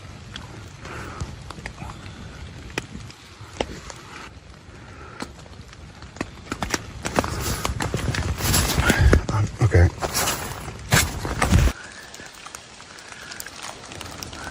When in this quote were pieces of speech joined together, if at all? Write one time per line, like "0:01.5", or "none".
none